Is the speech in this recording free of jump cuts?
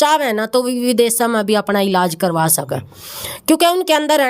yes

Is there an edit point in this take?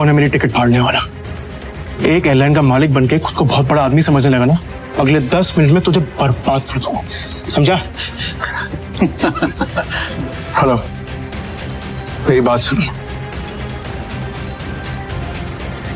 yes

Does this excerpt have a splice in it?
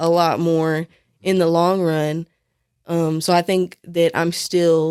no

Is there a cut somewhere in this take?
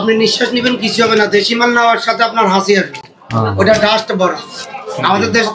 no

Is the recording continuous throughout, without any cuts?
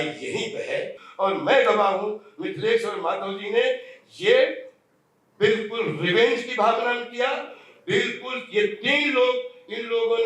no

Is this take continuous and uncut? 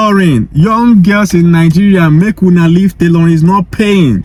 yes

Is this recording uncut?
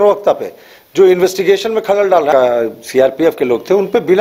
no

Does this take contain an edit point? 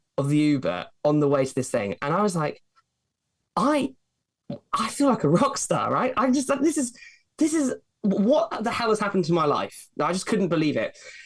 no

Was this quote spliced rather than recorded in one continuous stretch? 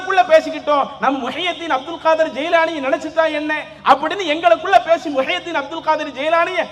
no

